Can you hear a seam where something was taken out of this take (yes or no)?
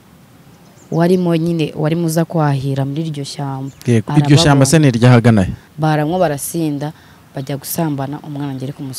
yes